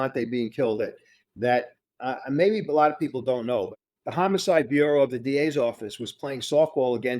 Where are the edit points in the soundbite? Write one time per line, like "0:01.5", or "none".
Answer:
0:03.7

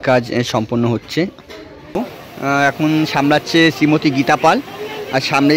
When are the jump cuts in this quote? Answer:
0:02.0

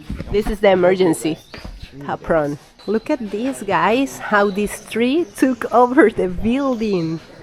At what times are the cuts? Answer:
0:02.7

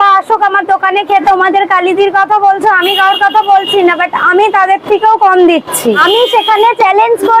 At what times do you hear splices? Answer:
0:01.2
0:06.0

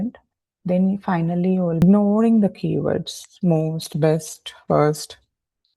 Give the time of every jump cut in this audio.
0:01.8

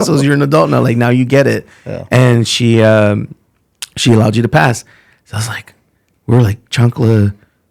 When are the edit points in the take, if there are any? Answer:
none

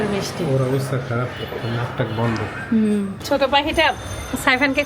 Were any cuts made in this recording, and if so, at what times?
0:03.2

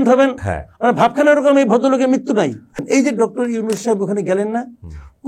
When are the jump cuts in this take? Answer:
0:02.8

